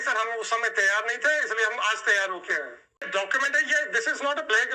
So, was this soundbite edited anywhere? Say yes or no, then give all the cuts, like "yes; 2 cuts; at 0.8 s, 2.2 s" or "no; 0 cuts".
yes; 1 cut; at 3.1 s